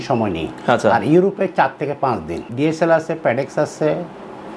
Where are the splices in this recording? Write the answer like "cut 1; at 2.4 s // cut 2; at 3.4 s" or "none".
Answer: cut 1; at 2.4 s

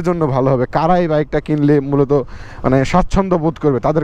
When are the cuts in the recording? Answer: none

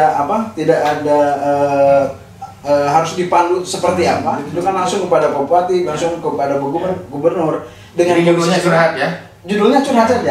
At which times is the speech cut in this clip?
cut 1; at 4.5 s

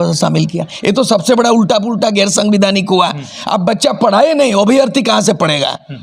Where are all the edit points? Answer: none

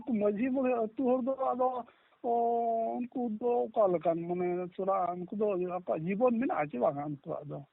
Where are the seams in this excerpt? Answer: none

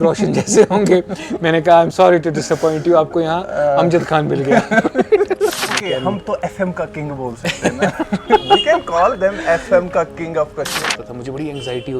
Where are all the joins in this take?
cut 1; at 5.8 s // cut 2; at 10.9 s

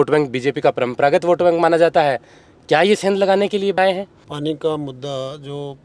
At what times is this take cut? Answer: cut 1; at 3.8 s

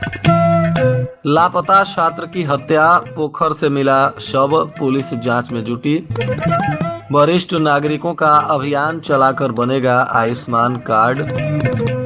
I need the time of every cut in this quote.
cut 1; at 1.1 s

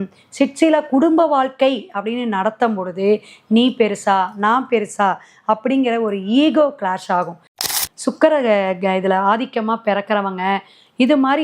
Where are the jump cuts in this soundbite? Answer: cut 1; at 7.6 s

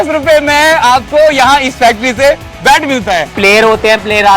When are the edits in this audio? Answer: cut 1; at 3.3 s

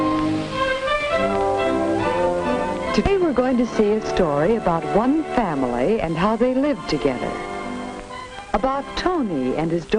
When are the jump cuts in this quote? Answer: none

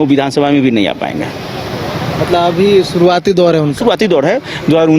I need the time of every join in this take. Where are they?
none

